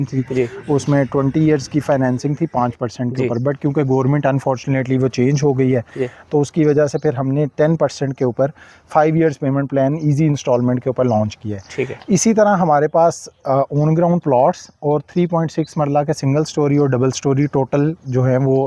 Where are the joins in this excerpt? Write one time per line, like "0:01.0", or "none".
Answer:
none